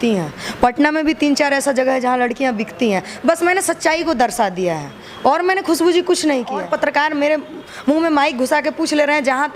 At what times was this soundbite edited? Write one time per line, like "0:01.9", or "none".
0:06.6